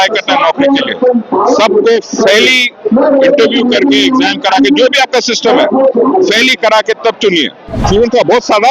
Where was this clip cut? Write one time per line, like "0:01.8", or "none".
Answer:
0:07.8